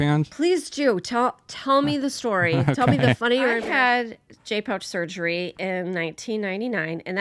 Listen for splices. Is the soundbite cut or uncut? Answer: cut